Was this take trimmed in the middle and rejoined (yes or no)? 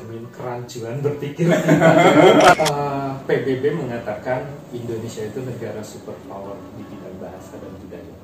yes